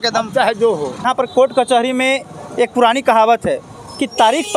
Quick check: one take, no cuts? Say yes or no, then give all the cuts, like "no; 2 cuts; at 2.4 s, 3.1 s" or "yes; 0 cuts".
no; 1 cut; at 1.1 s